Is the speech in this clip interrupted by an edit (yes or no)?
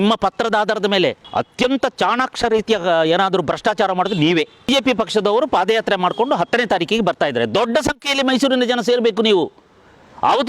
yes